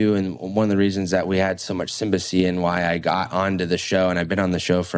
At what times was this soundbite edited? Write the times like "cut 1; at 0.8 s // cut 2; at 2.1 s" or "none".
none